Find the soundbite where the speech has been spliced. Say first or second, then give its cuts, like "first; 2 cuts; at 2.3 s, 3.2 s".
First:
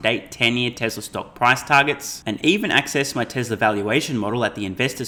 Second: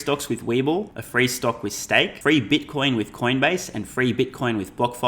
second; 2 cuts; at 1.0 s, 2.1 s